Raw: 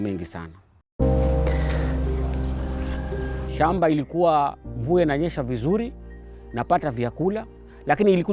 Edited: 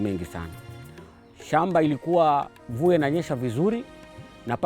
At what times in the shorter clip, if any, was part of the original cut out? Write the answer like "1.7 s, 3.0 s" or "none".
0.9 s